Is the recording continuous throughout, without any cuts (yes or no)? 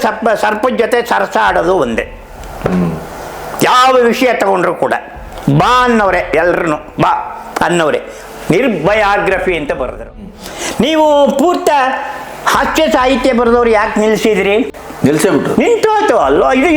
no